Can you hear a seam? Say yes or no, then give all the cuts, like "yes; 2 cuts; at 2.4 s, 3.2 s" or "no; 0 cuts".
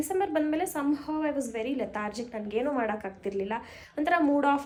no; 0 cuts